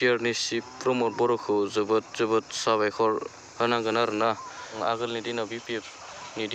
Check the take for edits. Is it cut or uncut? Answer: cut